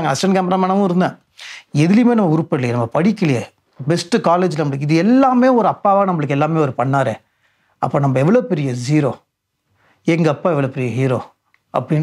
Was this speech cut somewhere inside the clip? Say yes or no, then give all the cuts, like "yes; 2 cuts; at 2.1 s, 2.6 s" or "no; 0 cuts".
no; 0 cuts